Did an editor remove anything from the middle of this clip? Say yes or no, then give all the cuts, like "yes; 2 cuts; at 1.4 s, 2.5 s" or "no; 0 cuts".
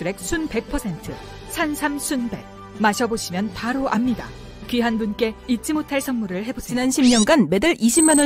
yes; 1 cut; at 6.6 s